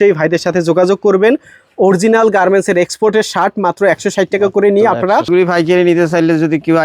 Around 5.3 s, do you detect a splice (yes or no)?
yes